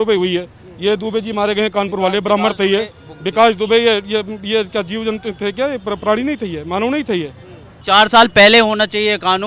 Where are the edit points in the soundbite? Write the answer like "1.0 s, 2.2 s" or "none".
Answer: 7.7 s